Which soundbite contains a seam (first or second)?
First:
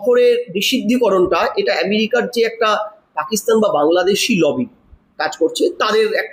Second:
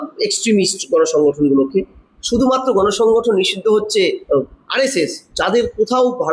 second